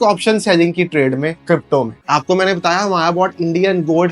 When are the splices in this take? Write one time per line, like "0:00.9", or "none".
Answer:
none